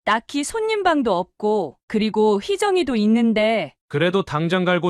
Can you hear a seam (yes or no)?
yes